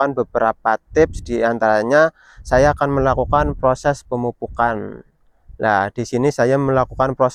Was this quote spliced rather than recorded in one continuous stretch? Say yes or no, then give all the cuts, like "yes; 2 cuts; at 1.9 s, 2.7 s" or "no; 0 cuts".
no; 0 cuts